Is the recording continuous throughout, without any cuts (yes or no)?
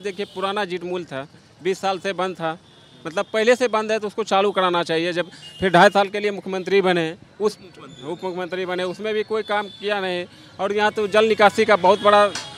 yes